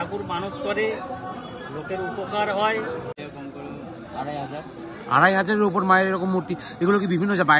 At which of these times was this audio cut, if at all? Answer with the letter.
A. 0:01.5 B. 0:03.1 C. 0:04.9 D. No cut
B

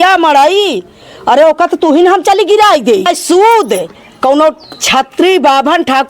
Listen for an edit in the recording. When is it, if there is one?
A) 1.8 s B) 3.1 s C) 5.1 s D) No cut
B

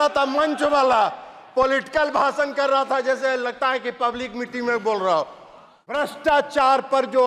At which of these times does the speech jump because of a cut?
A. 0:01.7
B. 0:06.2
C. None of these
B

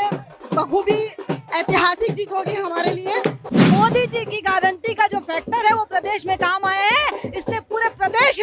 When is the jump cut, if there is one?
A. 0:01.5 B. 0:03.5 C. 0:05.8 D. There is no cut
B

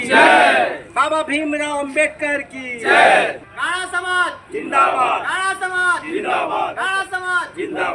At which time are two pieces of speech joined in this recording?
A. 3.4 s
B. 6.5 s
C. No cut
A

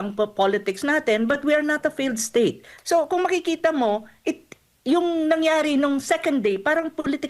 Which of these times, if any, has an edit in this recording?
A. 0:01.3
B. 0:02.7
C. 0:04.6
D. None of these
B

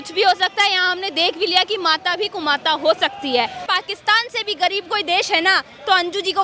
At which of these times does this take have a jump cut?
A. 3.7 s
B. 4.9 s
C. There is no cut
A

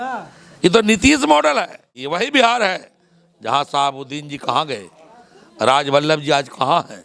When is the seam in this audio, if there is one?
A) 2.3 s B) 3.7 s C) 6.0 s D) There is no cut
A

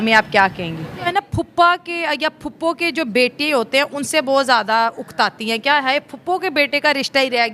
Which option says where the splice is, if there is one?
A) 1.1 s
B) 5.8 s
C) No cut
A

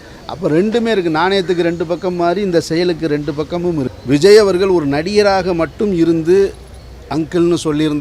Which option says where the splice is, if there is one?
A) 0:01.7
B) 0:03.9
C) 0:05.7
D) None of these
B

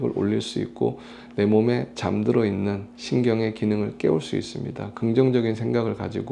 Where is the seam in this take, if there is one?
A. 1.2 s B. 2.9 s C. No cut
B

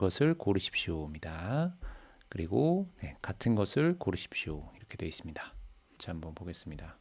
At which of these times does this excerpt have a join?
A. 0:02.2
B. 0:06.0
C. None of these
B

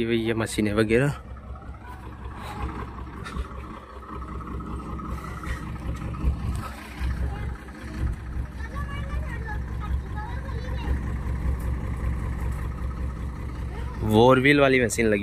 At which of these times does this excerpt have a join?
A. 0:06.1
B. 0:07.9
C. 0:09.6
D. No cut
D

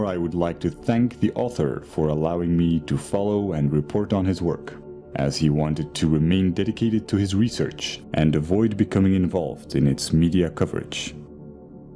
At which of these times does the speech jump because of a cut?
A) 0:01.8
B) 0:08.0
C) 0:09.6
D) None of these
C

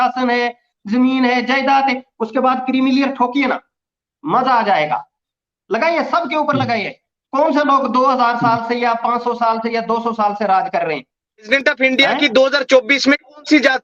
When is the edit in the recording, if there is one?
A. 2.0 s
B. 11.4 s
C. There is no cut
B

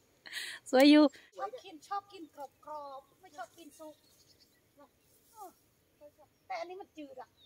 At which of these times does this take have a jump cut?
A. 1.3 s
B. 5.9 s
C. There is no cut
A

